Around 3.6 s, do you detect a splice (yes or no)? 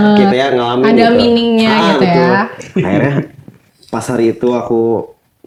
no